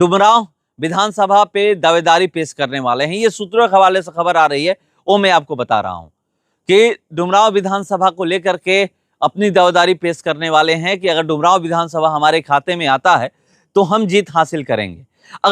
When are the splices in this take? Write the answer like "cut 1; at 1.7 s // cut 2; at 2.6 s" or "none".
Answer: none